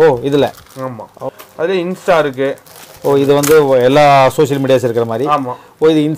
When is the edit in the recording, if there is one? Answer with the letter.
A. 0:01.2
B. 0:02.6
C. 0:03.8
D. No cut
A